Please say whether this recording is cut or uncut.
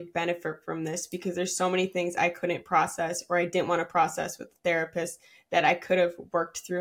uncut